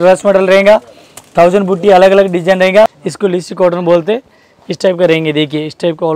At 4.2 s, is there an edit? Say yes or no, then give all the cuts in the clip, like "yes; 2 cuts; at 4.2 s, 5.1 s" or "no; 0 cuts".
no; 1 cut; at 2.9 s